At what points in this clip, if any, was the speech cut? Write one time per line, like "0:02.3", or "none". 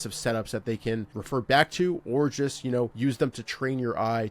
0:01.2
0:02.9

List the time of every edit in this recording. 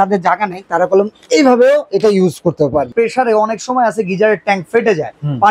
0:02.9

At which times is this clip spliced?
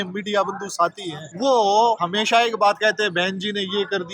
0:01.2
0:02.0

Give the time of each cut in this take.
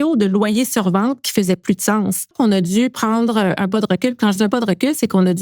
0:02.3

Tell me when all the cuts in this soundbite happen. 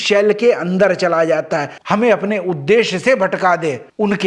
0:01.7

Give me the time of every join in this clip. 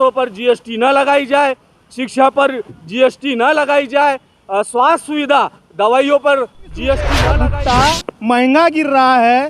0:07.2

